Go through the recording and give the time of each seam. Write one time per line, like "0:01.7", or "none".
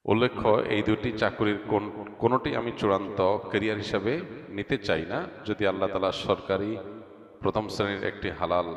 none

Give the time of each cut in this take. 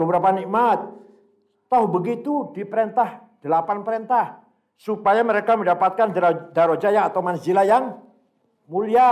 none

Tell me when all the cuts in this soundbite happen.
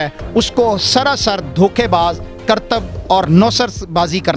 none

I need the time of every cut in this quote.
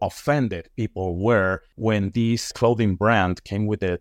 0:01.7

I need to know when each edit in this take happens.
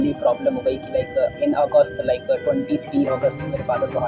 none

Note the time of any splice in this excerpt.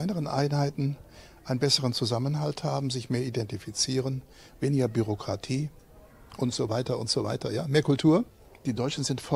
0:08.4

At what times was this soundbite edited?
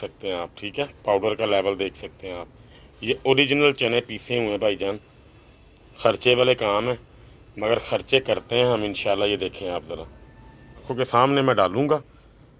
0:10.9

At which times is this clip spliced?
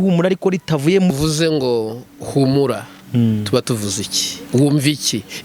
0:01.1

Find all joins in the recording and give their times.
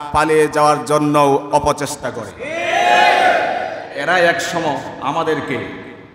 0:03.9

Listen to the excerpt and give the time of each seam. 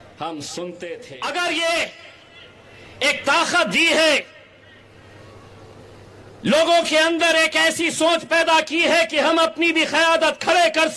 0:01.1

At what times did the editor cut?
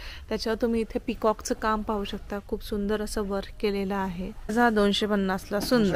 0:04.5

